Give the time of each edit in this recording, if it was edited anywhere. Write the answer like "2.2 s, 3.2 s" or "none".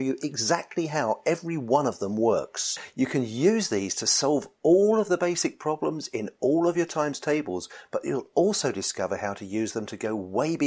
2.8 s

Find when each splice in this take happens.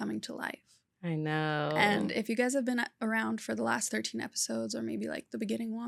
none

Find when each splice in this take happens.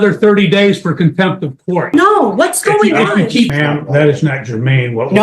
1.9 s, 3.5 s

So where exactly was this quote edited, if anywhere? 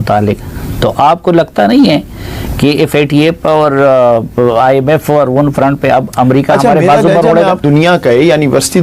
7.6 s

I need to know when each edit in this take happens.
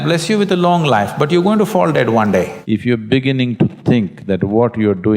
2.6 s

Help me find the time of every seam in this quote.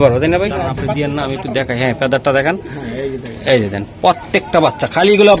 0.9 s

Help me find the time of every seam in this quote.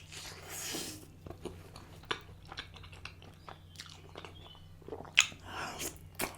2.0 s

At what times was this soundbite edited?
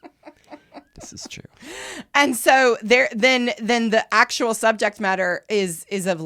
none

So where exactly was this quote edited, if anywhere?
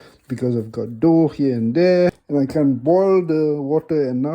2.2 s

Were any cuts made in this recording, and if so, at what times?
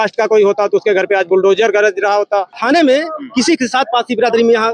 2.5 s

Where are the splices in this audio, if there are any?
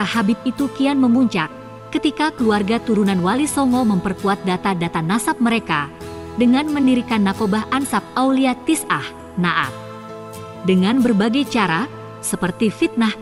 none

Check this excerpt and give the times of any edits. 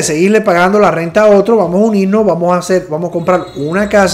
none

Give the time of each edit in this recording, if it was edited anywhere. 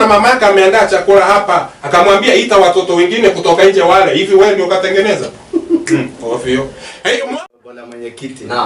7.4 s

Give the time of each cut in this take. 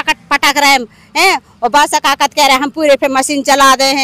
none

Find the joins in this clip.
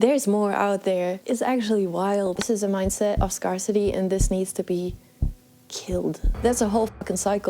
1.2 s, 2.4 s, 6.3 s

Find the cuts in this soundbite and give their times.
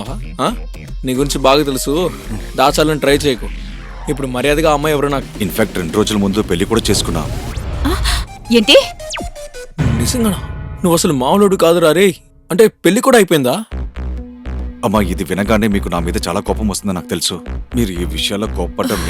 5.3 s

